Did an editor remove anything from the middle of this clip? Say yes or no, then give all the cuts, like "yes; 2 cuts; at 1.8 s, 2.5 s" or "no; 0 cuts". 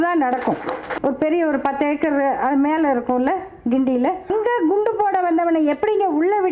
yes; 2 cuts; at 0.9 s, 4.3 s